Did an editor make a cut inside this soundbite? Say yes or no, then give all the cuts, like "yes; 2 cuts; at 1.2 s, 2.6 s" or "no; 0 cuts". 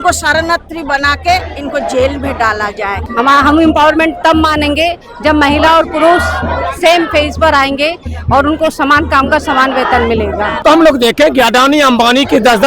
yes; 2 cuts; at 3.0 s, 10.6 s